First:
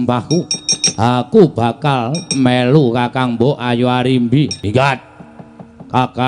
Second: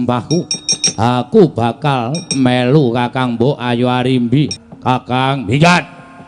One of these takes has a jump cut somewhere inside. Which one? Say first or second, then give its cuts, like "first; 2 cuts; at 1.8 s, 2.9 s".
second; 1 cut; at 4.6 s